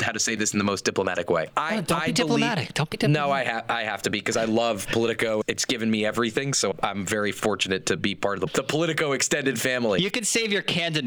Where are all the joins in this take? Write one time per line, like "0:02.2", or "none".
none